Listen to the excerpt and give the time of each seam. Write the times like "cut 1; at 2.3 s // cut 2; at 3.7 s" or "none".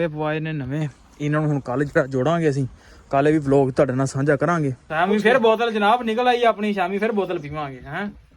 cut 1; at 4.8 s